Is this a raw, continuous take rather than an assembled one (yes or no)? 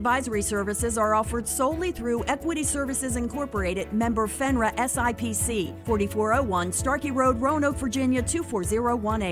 yes